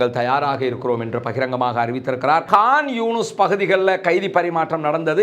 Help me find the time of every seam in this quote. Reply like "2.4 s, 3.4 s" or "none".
2.5 s